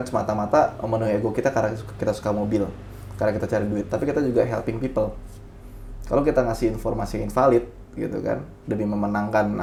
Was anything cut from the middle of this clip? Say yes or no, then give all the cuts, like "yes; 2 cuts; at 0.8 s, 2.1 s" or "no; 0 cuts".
no; 0 cuts